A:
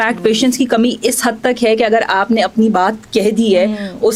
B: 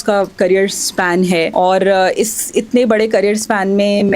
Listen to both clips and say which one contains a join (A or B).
B